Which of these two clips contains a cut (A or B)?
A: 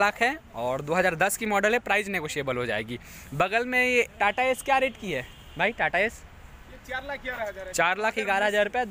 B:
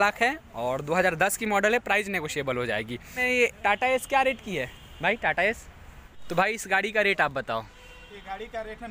B